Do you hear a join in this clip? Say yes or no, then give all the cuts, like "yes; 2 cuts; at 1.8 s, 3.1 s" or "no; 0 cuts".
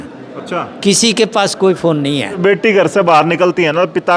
yes; 1 cut; at 2.4 s